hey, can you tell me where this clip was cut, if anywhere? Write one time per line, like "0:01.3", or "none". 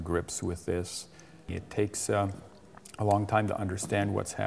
0:01.6